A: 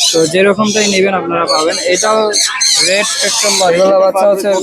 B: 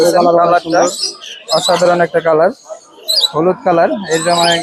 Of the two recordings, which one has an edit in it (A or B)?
A